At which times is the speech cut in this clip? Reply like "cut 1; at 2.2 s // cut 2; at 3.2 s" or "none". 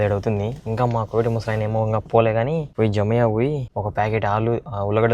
cut 1; at 2.7 s // cut 2; at 3.7 s